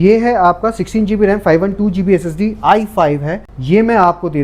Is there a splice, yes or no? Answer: no